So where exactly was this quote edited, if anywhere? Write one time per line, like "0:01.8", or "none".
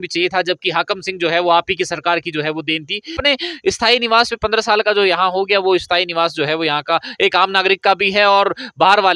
0:03.2